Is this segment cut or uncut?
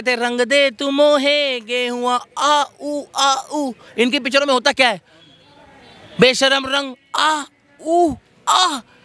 uncut